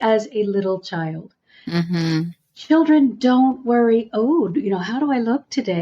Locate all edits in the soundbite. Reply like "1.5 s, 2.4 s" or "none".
none